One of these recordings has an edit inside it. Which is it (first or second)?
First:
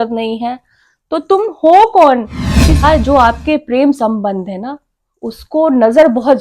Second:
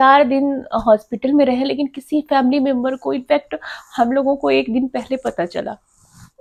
first